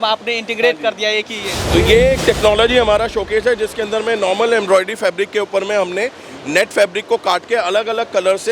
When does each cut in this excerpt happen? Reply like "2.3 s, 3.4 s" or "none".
1.5 s

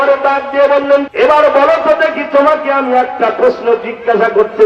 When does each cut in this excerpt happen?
1.1 s

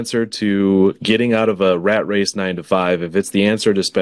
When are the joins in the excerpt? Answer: none

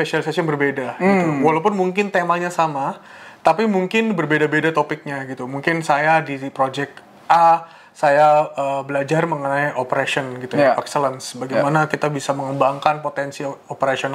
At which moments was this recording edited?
none

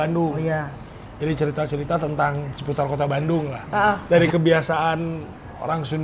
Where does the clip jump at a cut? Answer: 3.7 s

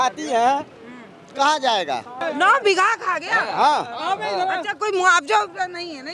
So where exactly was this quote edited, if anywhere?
2.2 s

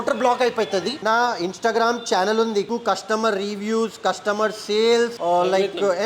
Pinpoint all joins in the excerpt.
0.9 s, 2.7 s

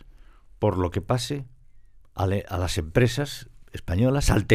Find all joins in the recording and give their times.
none

